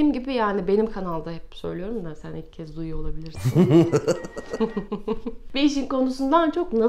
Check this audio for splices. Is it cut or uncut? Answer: uncut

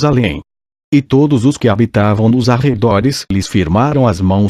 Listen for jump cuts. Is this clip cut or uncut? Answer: uncut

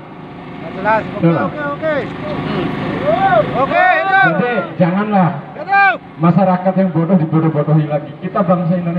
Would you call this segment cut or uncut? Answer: uncut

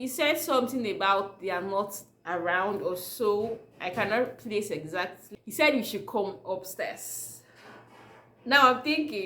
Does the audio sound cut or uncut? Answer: cut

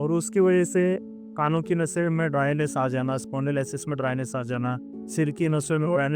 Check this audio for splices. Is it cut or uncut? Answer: uncut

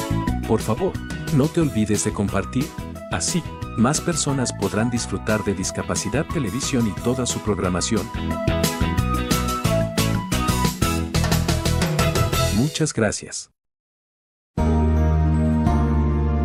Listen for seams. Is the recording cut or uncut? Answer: uncut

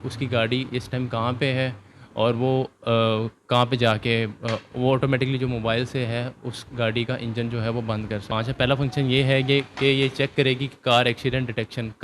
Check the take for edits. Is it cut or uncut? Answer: cut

